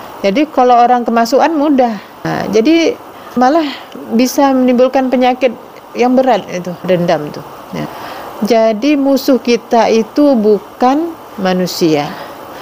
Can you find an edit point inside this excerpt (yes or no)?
yes